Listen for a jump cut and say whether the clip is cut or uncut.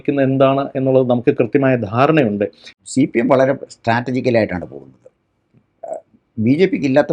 cut